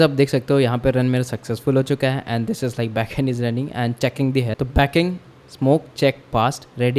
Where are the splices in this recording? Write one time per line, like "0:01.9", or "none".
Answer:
0:04.5